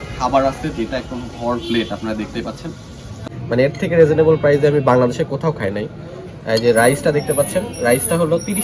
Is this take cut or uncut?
cut